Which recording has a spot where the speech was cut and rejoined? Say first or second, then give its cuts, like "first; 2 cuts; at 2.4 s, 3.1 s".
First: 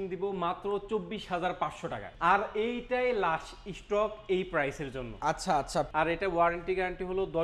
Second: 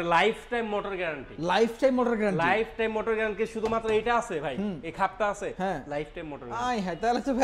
first; 2 cuts; at 2.1 s, 5.9 s